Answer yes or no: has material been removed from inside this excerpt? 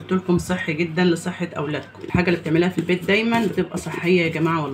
yes